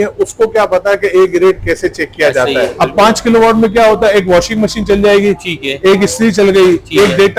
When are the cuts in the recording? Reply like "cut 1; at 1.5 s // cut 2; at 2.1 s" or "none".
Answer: cut 1; at 2.7 s